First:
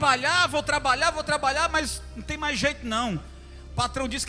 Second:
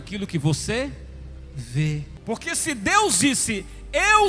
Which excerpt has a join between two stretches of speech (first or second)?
second